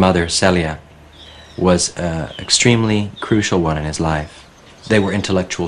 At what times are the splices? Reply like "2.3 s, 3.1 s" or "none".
4.1 s